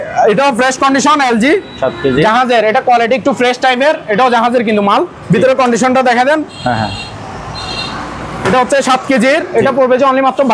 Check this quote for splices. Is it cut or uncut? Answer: uncut